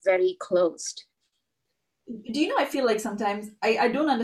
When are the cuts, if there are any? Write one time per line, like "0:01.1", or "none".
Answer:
0:01.6